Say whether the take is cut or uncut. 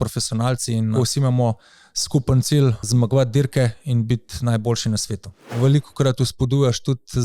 cut